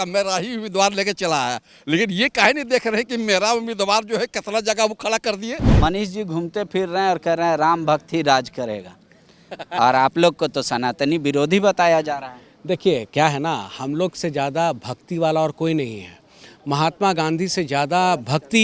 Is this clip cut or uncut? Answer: cut